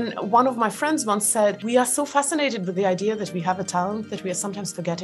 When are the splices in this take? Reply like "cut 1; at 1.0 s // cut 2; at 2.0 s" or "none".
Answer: cut 1; at 1.6 s